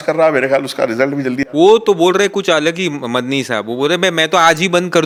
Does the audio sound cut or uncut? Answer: uncut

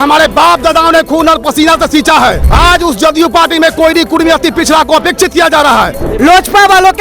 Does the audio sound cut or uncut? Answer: cut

